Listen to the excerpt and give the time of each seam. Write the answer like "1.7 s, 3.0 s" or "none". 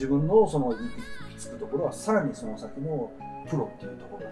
none